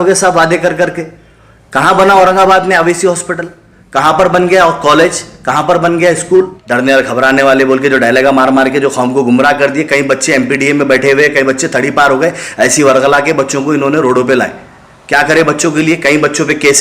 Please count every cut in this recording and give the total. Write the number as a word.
one